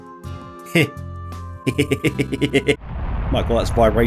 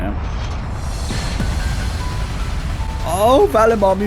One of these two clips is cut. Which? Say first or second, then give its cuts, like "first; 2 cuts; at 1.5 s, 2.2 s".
first; 1 cut; at 2.8 s